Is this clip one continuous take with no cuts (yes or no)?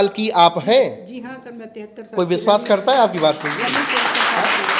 yes